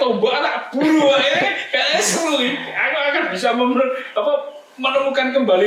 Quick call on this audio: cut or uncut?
uncut